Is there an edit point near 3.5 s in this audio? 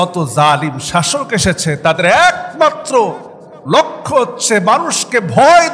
no; 0 cuts

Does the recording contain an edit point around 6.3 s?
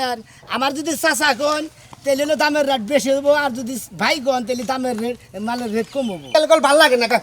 yes; 1 cut; at 6.3 s

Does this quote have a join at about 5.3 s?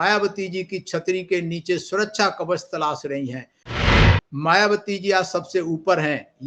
no; 1 cut; at 3.9 s

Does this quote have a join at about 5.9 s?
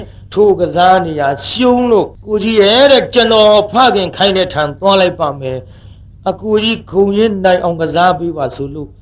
no; 1 cut; at 2.2 s

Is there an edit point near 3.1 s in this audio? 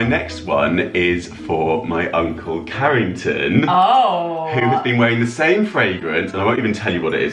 no; 0 cuts

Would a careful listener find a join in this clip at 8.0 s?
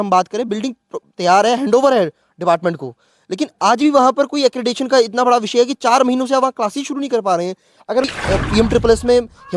yes; 1 cut; at 8.0 s

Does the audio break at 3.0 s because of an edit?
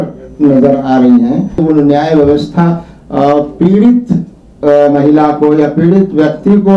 no; 1 cut; at 1.6 s

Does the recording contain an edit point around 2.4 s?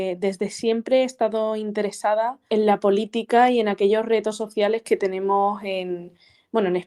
yes; 1 cut; at 2.4 s

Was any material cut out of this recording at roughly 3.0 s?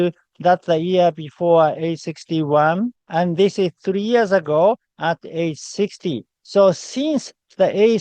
yes; 1 cut; at 3.0 s

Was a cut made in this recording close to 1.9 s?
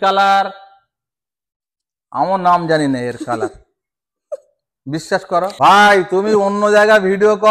no; 1 cut; at 5.5 s

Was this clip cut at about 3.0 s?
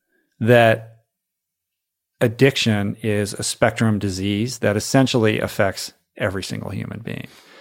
yes; 2 cuts; at 3.0 s, 4.5 s

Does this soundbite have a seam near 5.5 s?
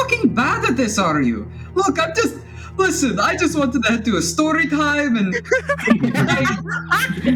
no; 0 cuts

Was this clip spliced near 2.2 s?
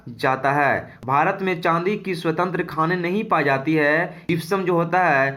no; 2 cuts; at 0.9 s, 4.2 s

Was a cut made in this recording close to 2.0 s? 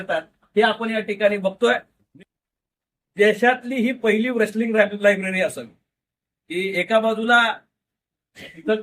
yes; 1 cut; at 2.0 s

